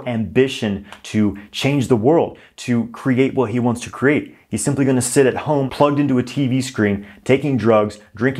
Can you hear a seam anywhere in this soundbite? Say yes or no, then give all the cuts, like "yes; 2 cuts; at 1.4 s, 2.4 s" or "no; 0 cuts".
yes; 1 cut; at 5.7 s